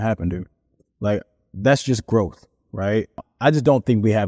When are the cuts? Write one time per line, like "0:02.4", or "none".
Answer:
0:03.3